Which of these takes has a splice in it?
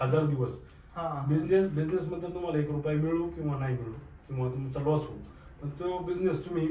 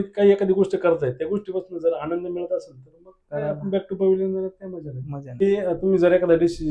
second; 1 cut; at 5.4 s

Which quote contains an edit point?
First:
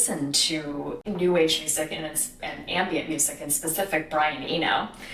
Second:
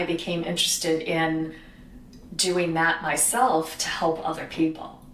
first; 1 cut; at 1.0 s

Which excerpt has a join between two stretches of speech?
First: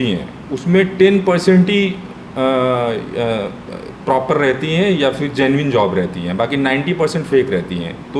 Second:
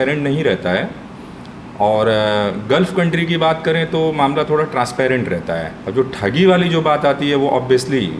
second; 1 cut; at 5.8 s

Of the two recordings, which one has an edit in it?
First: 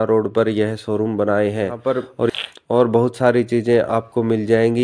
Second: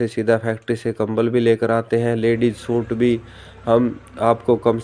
first; 1 cut; at 2.3 s

